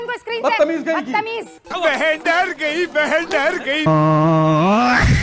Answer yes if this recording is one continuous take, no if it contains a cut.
no